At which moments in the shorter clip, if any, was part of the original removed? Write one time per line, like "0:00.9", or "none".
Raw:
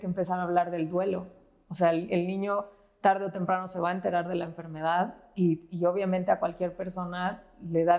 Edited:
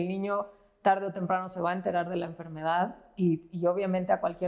none